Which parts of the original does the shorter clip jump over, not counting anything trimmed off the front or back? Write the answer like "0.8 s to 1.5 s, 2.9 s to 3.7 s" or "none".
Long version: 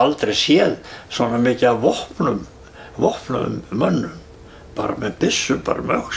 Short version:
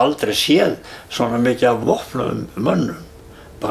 1.8 s to 2.9 s